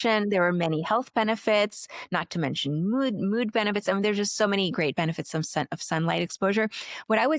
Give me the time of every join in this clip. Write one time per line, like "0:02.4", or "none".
none